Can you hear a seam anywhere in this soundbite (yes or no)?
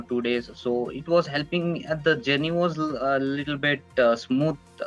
no